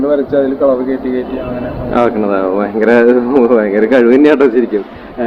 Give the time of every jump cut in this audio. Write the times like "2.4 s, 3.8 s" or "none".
none